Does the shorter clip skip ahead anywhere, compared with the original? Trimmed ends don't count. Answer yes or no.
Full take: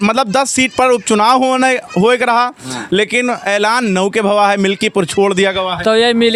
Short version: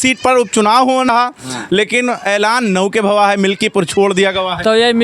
yes